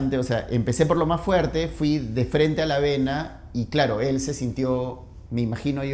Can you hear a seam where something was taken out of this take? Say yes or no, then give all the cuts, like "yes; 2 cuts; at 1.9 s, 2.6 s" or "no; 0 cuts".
no; 0 cuts